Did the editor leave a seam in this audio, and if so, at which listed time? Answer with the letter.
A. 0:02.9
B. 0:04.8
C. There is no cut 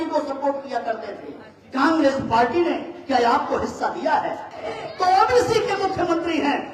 B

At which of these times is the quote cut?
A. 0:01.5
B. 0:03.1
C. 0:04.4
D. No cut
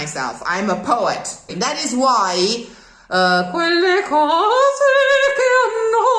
A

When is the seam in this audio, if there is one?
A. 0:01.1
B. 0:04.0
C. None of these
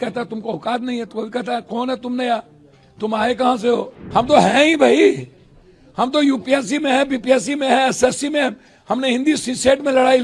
B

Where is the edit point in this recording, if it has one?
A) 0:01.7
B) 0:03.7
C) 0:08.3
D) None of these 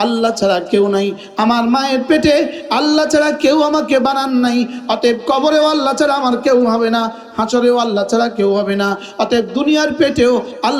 D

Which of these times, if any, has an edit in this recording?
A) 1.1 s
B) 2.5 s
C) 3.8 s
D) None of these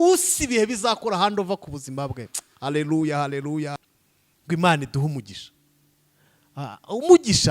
C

